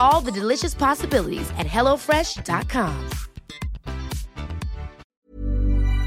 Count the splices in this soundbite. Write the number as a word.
one